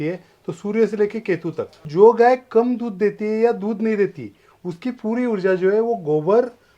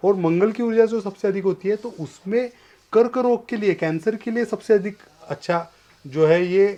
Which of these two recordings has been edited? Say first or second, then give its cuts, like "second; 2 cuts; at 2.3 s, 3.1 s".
first; 1 cut; at 1.9 s